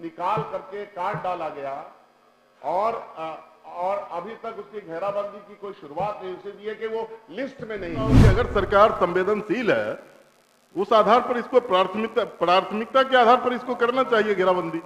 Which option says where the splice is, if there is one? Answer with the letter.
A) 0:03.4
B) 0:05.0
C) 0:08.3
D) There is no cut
C